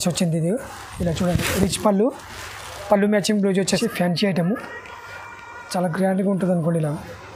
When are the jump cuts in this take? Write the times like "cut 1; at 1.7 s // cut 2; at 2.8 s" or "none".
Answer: cut 1; at 3.8 s